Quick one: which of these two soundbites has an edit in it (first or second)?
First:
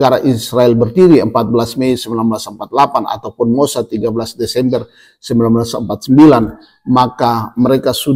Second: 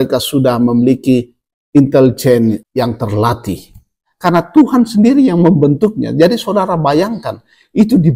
second